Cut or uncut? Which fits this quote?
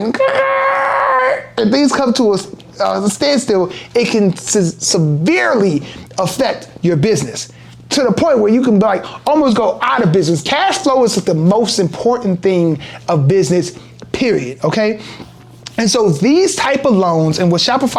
uncut